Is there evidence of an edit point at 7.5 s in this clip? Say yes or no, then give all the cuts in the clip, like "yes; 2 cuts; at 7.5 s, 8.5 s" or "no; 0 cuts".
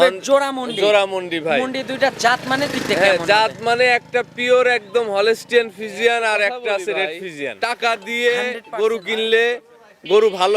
yes; 1 cut; at 7.5 s